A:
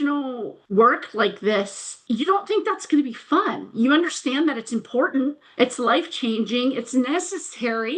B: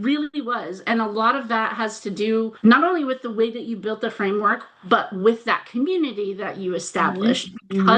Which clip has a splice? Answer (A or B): B